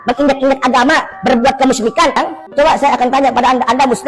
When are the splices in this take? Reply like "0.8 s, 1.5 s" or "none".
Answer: 2.2 s